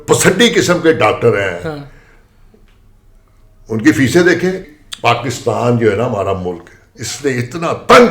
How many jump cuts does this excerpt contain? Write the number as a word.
one